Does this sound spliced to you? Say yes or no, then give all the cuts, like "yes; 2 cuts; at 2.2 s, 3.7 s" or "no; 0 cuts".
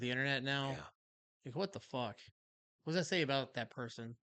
no; 0 cuts